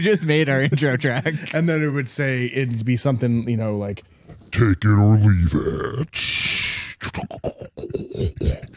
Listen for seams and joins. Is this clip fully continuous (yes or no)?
yes